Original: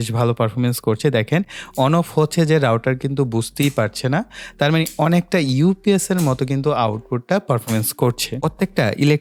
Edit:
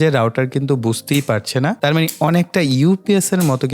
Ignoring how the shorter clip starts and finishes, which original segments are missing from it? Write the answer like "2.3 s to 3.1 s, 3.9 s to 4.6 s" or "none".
4.3 s to 4.5 s

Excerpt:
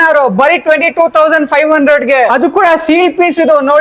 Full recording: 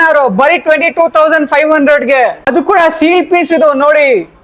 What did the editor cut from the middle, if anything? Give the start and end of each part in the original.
2.3 s to 2.5 s

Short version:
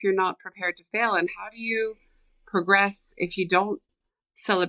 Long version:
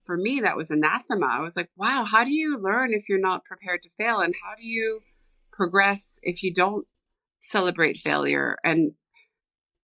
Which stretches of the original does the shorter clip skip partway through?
none

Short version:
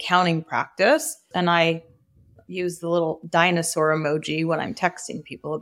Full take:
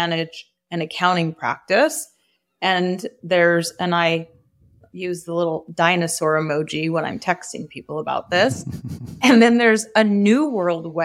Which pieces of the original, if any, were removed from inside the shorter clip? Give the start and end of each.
2.2 s to 3.7 s

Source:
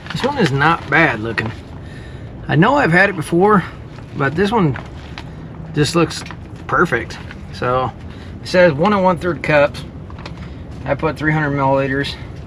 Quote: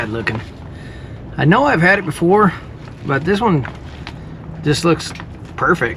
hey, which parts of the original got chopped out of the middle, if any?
none

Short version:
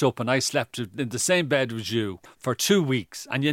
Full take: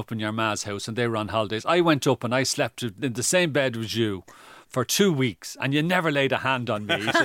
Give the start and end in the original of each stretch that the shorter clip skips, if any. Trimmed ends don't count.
4.3 s to 4.5 s

